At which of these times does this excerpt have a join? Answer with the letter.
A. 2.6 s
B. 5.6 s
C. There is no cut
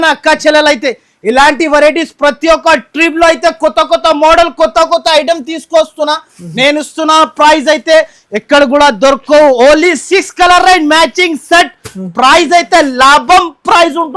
C